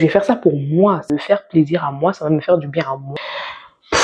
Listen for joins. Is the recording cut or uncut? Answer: cut